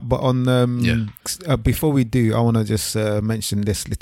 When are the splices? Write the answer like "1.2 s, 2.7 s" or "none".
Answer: 1.2 s